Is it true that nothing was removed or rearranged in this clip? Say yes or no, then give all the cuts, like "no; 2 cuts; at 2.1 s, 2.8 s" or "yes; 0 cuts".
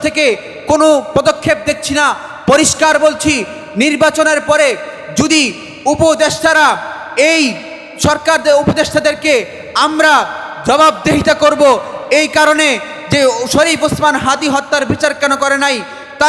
yes; 0 cuts